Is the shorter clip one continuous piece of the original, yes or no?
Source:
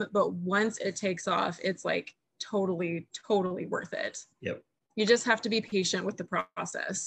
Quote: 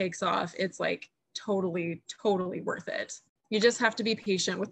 no